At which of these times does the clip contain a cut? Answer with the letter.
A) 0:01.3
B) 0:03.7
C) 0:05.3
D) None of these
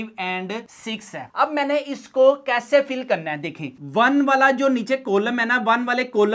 A